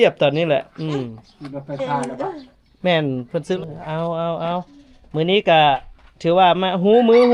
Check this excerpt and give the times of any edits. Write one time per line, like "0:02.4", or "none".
0:03.6